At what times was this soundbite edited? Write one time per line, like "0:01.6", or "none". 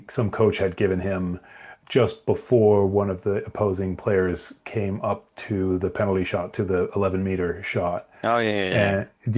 none